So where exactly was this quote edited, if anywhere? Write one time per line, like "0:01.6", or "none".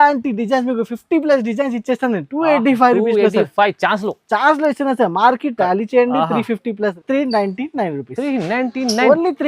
0:07.0